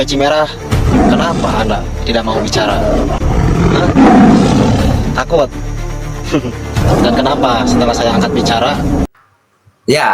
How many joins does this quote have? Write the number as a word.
one